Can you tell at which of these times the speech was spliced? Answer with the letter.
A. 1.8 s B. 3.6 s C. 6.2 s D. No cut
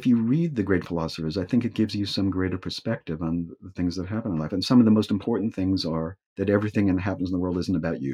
C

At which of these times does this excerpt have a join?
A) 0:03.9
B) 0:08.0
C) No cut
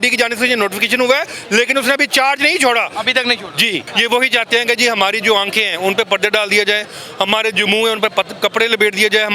A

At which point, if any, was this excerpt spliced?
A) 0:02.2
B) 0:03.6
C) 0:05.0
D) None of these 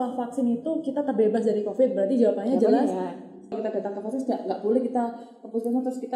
B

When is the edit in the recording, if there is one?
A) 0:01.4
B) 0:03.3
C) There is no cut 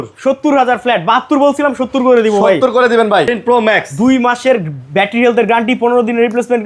B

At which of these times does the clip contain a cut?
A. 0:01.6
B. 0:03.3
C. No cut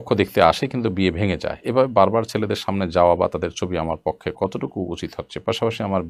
C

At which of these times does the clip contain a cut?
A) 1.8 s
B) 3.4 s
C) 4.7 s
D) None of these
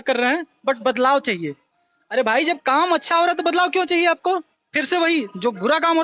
D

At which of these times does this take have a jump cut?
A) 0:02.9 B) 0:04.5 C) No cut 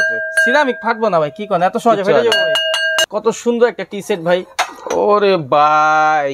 A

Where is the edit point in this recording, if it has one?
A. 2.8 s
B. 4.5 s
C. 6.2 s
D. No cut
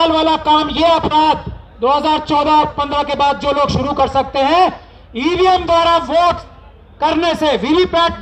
D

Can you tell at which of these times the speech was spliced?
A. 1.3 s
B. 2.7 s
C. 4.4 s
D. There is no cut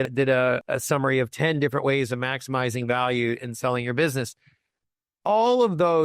D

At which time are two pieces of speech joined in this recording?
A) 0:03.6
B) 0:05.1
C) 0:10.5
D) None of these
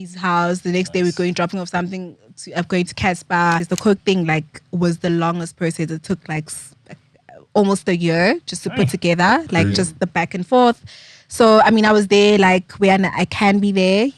A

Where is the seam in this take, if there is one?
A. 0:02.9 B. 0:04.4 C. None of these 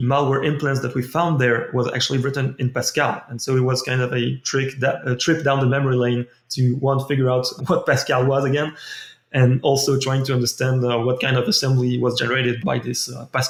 C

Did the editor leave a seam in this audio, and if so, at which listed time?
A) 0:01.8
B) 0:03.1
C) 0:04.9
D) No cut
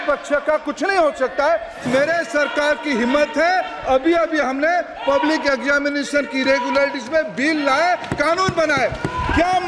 A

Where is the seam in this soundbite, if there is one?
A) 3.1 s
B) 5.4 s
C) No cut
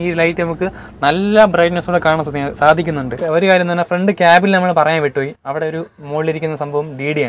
A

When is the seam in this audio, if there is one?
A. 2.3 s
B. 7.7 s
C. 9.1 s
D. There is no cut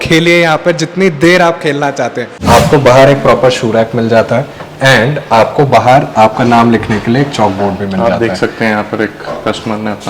A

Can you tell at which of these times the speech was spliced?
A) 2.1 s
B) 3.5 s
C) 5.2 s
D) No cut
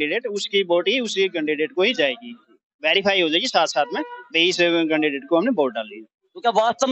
D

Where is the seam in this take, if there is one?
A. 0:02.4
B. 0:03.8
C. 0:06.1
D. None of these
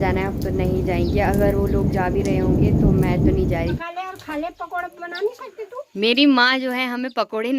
B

